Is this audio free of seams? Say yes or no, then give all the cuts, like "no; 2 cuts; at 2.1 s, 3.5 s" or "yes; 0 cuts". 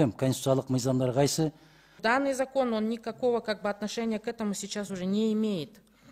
no; 1 cut; at 1.9 s